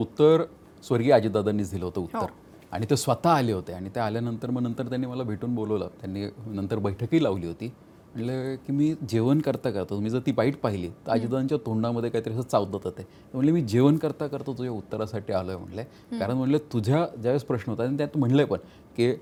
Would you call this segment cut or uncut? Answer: uncut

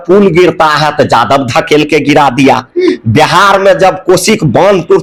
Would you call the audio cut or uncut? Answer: uncut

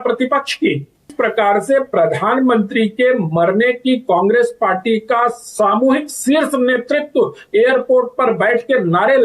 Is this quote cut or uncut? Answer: cut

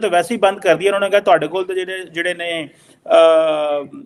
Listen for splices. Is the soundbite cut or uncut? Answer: uncut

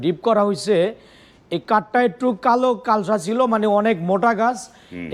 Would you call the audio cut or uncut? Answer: uncut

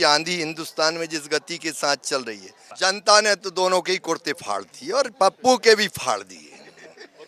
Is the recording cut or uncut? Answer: cut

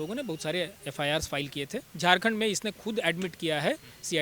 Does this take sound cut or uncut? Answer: cut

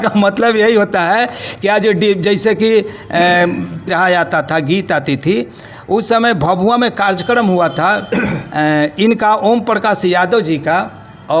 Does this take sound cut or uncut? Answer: cut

